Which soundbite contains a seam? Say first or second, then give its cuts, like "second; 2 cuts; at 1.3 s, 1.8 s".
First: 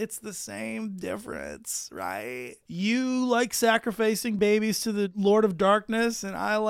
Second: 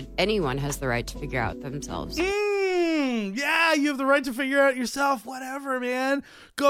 first; 2 cuts; at 2.6 s, 4.6 s